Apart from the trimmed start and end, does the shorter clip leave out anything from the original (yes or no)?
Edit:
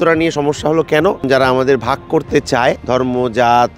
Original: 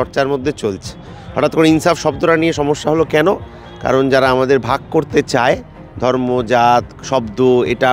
yes